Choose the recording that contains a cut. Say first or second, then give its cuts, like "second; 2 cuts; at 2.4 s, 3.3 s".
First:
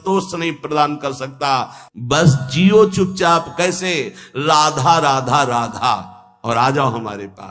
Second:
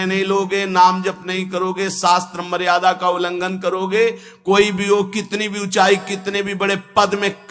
first; 1 cut; at 1.8 s